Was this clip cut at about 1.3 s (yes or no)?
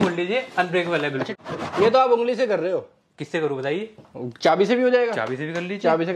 yes